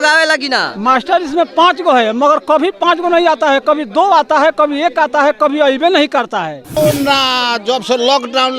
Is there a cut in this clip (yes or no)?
yes